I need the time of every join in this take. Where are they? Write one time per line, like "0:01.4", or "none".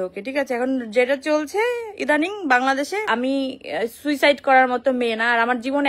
0:03.1